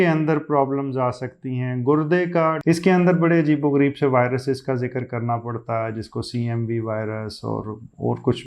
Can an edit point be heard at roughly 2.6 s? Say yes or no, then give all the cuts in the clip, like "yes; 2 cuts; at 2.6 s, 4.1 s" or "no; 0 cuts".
yes; 1 cut; at 2.6 s